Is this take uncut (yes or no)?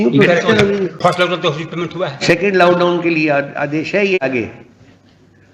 no